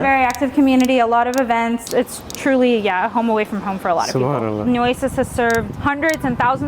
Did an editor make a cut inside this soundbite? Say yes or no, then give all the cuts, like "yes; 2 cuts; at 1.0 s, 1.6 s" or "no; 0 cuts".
yes; 2 cuts; at 1.9 s, 4.6 s